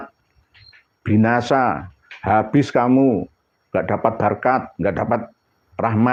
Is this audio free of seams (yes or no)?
yes